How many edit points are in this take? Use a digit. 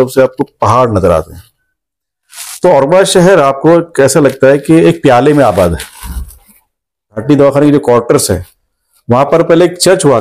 1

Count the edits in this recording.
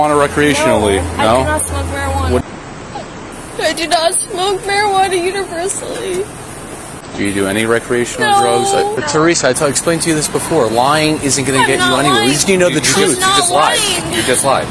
2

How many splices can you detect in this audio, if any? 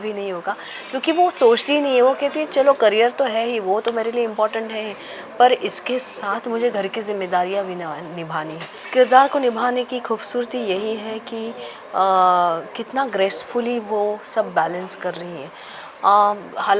1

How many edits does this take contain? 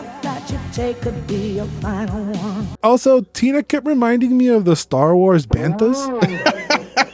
1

